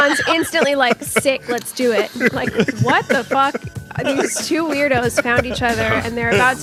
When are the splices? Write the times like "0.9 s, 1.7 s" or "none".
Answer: none

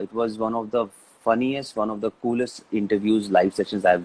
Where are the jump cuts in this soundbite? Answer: none

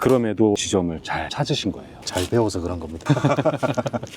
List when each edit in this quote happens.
none

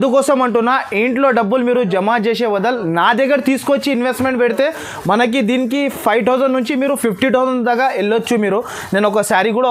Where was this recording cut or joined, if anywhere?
none

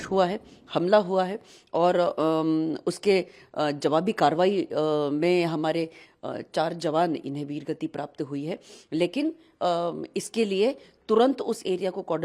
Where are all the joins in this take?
none

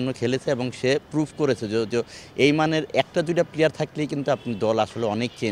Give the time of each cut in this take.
none

